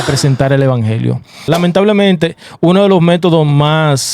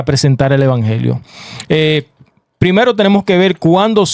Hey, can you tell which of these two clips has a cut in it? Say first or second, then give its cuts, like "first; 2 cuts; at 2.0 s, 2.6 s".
first; 1 cut; at 1.4 s